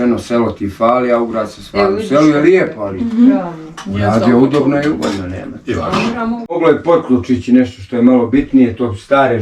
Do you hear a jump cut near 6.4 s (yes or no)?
yes